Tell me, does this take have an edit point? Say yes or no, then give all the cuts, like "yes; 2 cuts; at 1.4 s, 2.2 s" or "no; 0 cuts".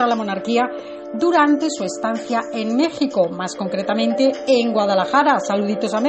no; 0 cuts